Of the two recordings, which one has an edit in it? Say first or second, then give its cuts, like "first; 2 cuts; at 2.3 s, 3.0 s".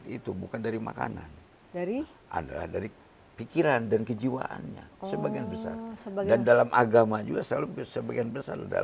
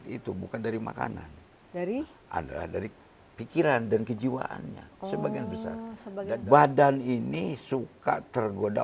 second; 1 cut; at 6.1 s